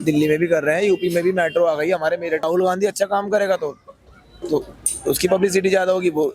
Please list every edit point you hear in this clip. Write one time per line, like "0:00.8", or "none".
0:02.5